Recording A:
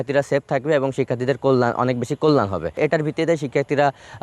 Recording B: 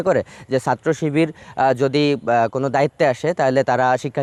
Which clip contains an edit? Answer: A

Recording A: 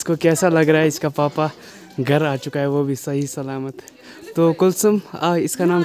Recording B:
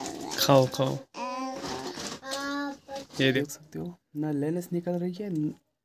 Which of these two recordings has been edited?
B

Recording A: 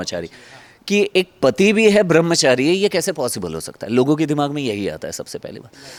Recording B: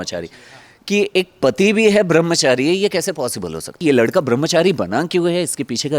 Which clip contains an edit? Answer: B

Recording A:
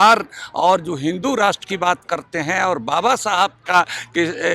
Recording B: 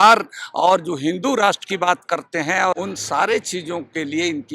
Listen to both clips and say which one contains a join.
B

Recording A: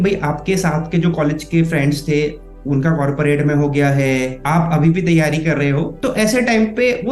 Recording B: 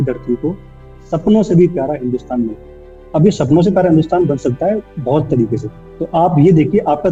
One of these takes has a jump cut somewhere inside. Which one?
A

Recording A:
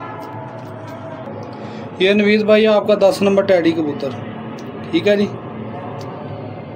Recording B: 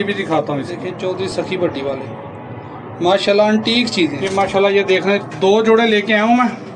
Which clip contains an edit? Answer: B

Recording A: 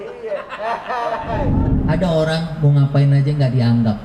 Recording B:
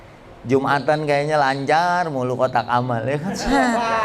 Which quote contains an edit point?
A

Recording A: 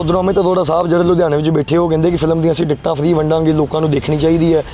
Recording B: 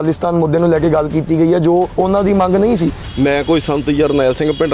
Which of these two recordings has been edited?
B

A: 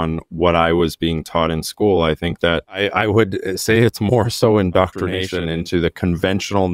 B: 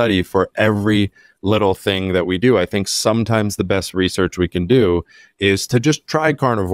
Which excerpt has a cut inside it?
A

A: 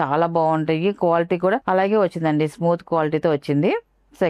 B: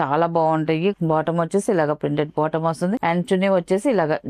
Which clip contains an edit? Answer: B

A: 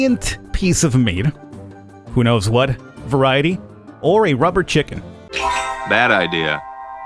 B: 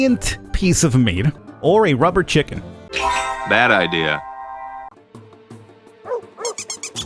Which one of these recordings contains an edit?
B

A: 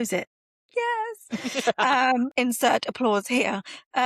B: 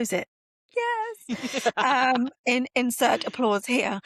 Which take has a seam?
A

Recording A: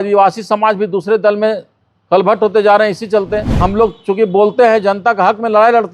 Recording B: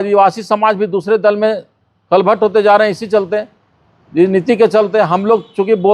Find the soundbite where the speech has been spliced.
A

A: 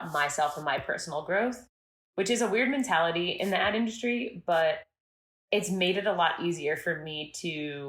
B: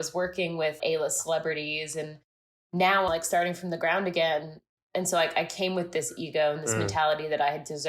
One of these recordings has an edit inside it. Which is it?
B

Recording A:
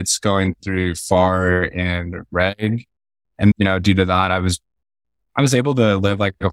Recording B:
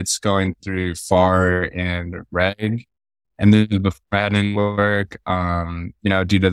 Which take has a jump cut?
A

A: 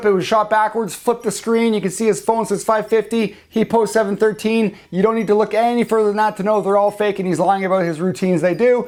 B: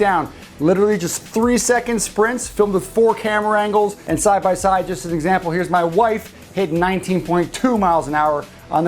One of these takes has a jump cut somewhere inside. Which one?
B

